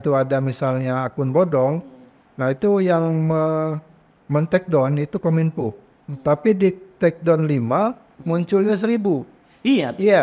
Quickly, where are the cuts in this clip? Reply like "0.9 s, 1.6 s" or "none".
none